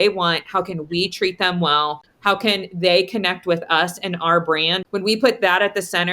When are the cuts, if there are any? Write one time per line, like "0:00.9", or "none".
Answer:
0:02.1
0:04.8